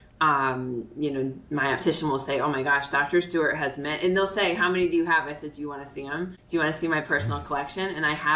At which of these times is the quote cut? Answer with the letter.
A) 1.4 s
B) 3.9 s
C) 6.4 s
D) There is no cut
C